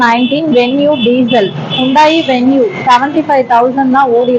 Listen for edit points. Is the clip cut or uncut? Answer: uncut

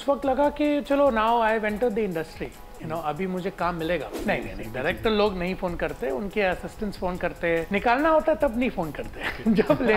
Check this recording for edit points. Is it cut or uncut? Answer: cut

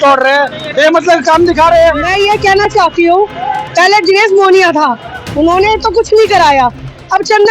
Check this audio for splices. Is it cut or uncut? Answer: cut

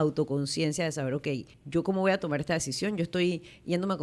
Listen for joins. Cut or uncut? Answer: cut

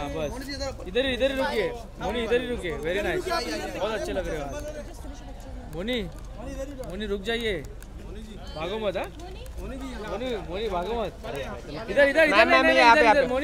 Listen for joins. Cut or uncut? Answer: uncut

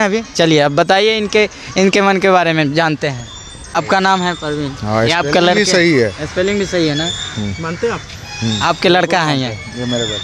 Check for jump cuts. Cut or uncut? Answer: cut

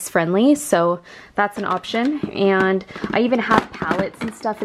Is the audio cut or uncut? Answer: uncut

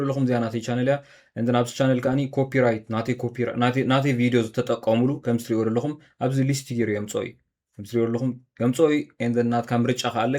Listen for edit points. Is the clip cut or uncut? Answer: uncut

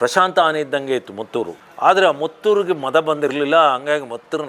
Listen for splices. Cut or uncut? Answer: uncut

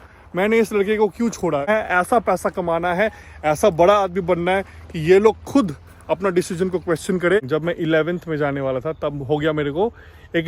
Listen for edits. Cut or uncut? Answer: cut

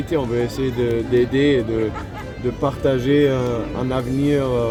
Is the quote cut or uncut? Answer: uncut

